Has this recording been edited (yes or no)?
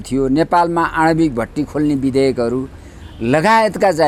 no